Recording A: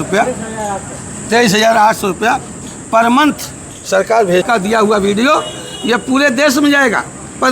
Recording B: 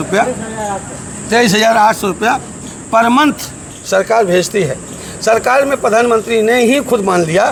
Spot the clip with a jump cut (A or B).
A